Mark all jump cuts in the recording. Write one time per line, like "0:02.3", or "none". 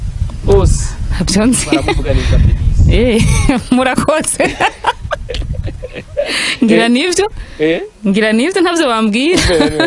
none